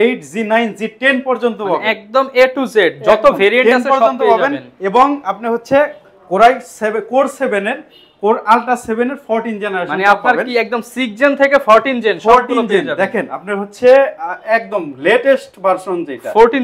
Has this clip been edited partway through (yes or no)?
no